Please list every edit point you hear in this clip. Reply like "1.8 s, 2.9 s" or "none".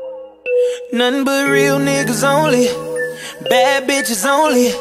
0.9 s